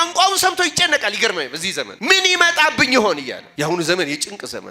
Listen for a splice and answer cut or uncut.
cut